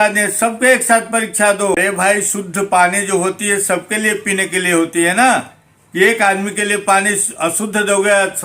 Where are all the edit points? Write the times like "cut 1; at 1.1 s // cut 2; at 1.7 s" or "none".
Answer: cut 1; at 1.8 s